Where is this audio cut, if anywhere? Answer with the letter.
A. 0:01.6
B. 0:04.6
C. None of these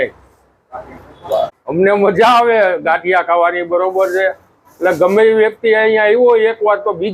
A